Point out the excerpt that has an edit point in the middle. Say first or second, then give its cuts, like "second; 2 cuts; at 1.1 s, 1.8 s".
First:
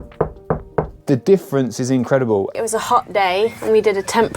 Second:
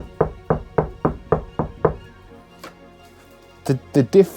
first; 2 cuts; at 1.0 s, 2.6 s